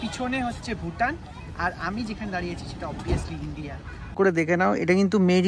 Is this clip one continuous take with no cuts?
no; 1 cut; at 4.2 s

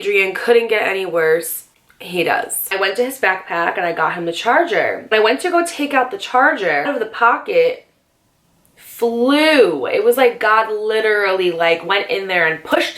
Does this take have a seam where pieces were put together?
yes; 3 cuts; at 2.6 s, 5.1 s, 6.9 s

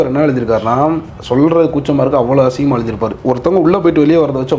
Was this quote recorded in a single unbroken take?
no; 1 cut; at 1.1 s

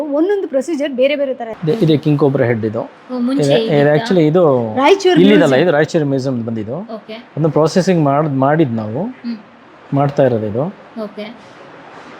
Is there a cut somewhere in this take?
yes; 1 cut; at 1.5 s

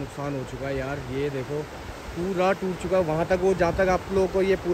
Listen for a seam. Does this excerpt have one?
no; 0 cuts

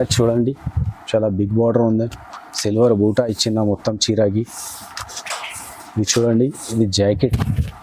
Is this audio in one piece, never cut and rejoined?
yes; 0 cuts

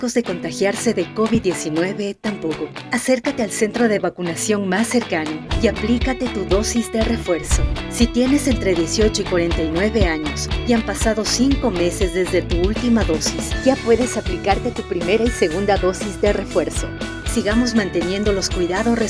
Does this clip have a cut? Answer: no; 0 cuts

